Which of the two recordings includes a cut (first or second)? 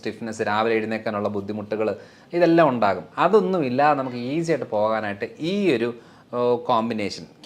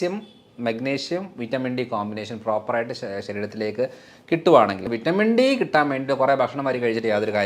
second